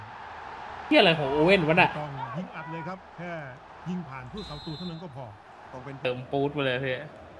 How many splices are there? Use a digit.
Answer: 1